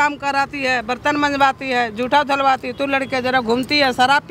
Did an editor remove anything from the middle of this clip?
no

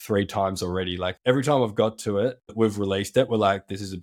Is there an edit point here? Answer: yes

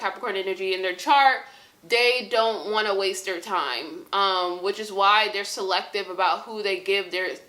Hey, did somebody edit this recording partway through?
no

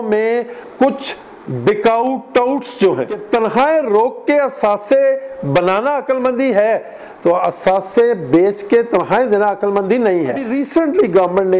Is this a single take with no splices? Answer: no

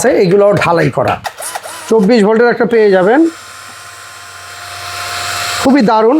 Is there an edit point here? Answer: yes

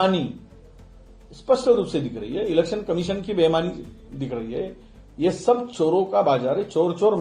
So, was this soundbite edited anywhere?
no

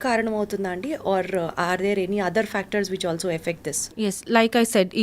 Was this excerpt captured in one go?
yes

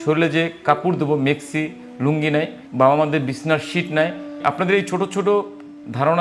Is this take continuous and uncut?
no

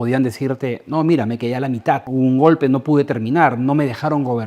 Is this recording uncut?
no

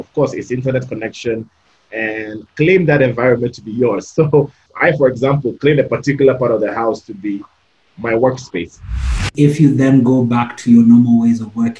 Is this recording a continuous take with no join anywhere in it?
no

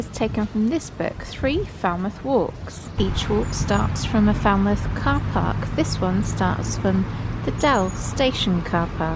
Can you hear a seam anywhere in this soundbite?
no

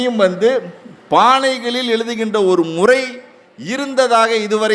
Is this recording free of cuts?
yes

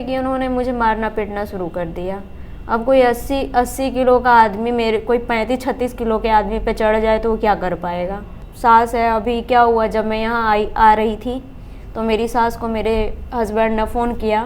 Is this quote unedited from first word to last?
no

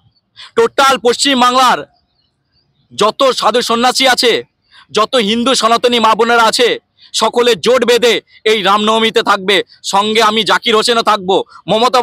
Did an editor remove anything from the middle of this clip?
no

